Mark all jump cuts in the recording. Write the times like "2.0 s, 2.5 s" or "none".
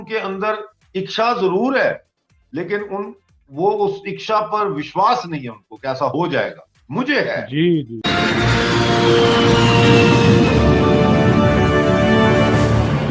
7.9 s